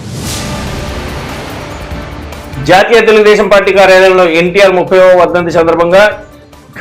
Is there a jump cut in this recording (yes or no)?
yes